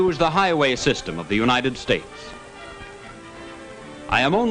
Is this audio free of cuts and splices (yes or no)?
yes